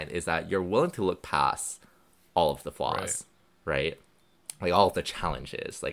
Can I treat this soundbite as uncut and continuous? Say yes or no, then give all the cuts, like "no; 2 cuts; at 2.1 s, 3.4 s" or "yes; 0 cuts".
yes; 0 cuts